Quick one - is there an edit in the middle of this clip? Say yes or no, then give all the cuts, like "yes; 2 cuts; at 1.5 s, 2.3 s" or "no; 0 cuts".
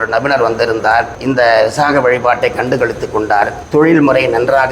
yes; 2 cuts; at 1.2 s, 3.6 s